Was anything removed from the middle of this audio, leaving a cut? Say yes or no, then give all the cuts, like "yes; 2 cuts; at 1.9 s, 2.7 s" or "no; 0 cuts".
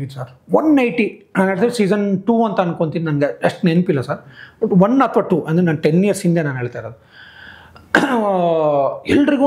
no; 0 cuts